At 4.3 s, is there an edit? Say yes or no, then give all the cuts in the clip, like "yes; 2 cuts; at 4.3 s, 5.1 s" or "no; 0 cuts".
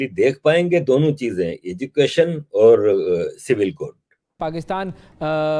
yes; 1 cut; at 4.3 s